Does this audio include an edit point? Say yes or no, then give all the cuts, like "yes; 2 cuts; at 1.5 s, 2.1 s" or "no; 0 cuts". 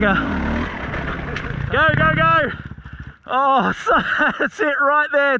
yes; 1 cut; at 1.5 s